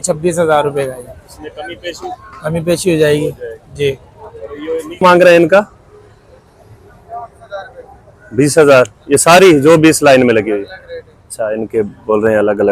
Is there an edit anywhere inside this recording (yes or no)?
yes